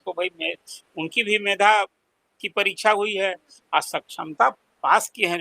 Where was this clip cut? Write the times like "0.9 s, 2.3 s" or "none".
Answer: none